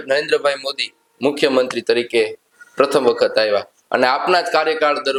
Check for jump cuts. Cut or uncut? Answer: uncut